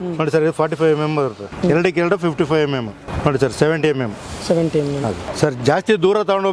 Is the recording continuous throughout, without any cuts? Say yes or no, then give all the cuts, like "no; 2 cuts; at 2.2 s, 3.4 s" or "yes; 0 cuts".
no; 3 cuts; at 1.5 s, 3.0 s, 5.3 s